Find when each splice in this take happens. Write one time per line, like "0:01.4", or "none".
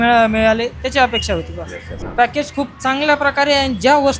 0:02.0